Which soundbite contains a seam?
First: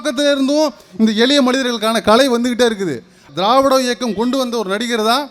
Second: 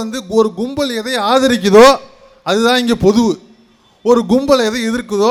first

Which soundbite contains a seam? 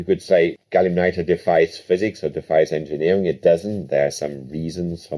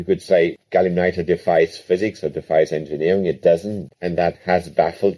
second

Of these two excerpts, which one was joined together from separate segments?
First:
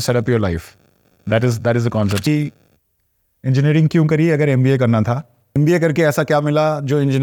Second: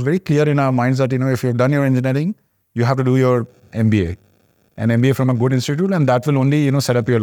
first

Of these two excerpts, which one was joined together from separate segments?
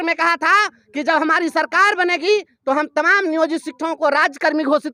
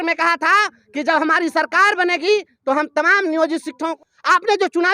second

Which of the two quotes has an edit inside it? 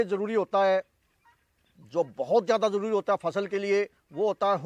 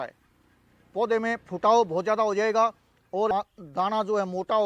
second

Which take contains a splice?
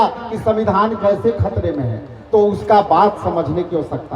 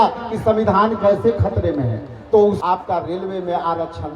second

